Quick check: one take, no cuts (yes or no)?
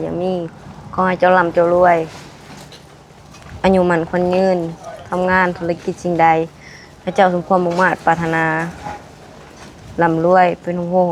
yes